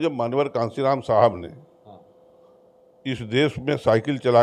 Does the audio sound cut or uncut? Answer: uncut